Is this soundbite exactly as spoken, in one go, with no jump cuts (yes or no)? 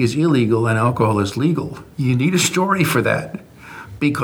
no